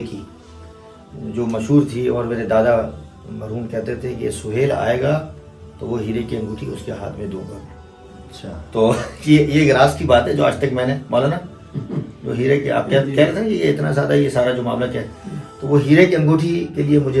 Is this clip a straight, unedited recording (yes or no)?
yes